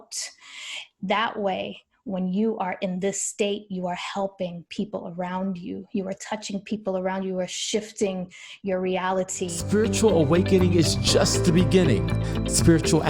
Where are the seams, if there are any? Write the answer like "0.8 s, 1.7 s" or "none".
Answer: 9.6 s